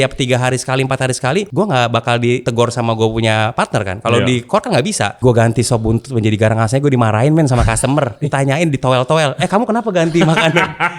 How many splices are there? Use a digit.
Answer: 3